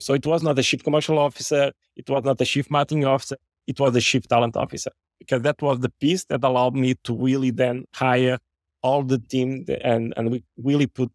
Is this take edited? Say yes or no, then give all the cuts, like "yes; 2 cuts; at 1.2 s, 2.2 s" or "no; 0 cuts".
no; 0 cuts